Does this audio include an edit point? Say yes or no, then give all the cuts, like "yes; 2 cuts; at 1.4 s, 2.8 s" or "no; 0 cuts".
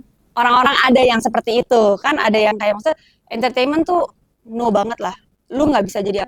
no; 0 cuts